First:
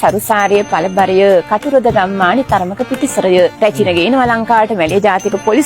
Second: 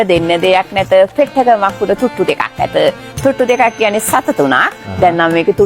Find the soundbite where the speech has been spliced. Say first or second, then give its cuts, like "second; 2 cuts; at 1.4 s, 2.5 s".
first; 1 cut; at 3.5 s